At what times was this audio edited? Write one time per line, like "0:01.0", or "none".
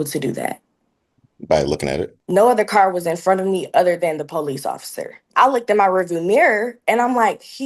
0:02.2
0:05.2